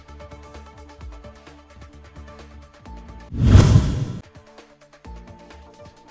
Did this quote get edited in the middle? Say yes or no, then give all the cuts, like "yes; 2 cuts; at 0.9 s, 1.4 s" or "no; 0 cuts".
yes; 1 cut; at 3.3 s